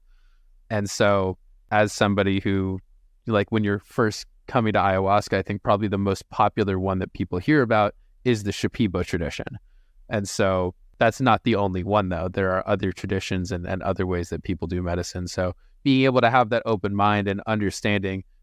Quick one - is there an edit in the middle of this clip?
yes; 2 cuts; at 1.6 s, 10.8 s

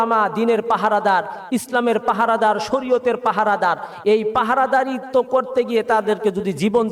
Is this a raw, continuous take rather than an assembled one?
yes; 0 cuts

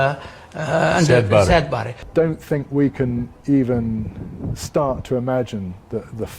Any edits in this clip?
yes; 1 cut; at 2.0 s

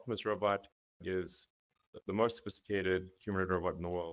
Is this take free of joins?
yes; 0 cuts

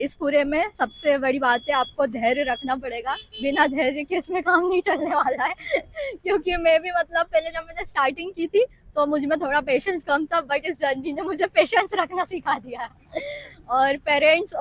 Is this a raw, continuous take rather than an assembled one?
yes; 0 cuts

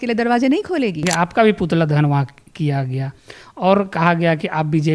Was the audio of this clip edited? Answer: yes; 1 cut; at 1.1 s

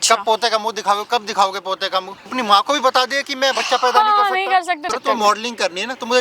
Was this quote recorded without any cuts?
no; 2 cuts; at 2.3 s, 4.9 s

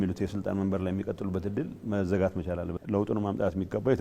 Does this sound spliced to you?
yes; 1 cut; at 2.7 s

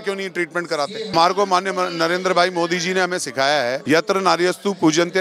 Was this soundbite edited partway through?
yes; 2 cuts; at 1.1 s, 3.8 s

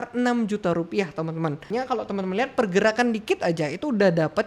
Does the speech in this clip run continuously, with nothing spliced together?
no; 1 cut; at 1.6 s

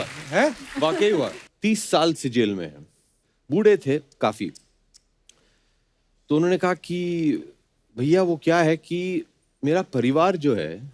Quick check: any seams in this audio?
yes; 1 cut; at 1.4 s

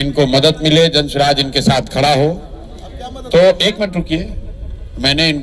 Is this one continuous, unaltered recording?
yes; 0 cuts

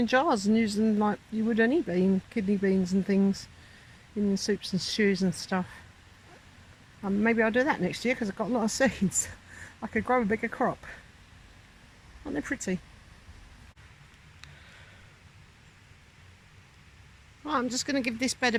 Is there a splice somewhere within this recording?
no; 0 cuts

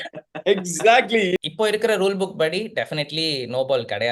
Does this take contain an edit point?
yes; 1 cut; at 1.4 s

